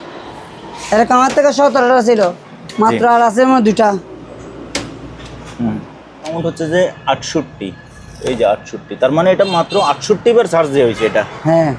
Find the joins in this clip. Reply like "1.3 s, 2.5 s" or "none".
6.3 s